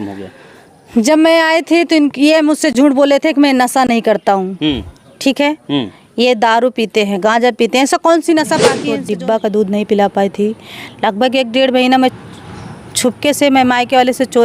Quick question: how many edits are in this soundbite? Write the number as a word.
one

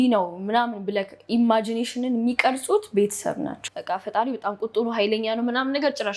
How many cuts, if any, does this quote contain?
one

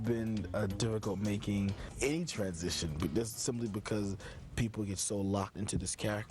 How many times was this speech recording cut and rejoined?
two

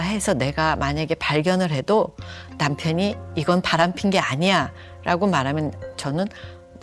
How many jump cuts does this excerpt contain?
zero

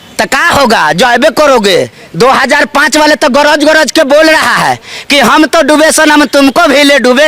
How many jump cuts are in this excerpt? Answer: one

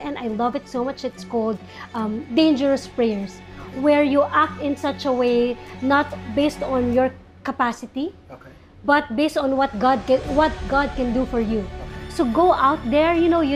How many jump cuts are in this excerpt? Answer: zero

